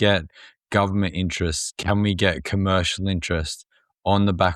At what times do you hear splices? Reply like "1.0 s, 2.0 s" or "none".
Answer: none